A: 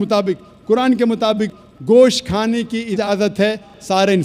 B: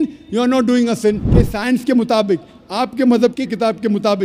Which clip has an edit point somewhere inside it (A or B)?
B